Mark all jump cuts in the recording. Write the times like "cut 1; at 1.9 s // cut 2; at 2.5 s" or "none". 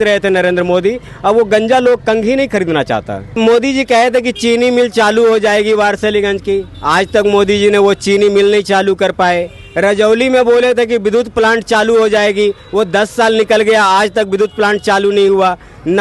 cut 1; at 3.2 s